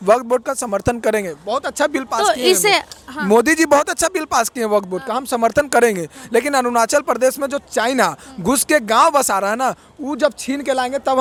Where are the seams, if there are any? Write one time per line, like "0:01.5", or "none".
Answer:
none